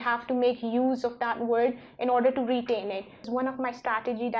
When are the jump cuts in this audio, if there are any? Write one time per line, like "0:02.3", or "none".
0:03.3